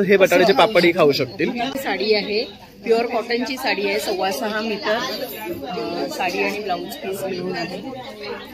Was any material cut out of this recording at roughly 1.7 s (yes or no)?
yes